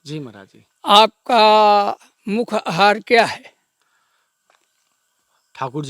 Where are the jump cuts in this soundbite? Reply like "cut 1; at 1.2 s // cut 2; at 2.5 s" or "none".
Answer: none